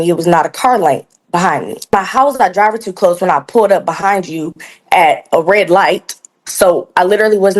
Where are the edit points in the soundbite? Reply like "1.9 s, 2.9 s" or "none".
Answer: 1.9 s